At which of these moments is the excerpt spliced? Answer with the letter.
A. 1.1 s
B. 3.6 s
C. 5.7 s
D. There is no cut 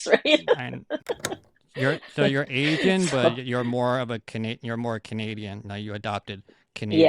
A